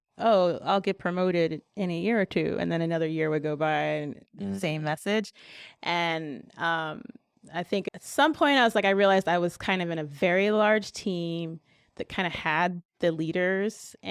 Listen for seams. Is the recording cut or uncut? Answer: uncut